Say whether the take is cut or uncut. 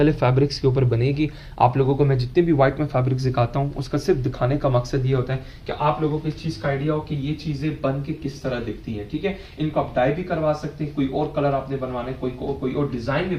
uncut